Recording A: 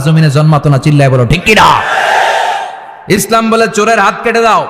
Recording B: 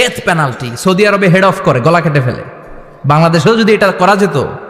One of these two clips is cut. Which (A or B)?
A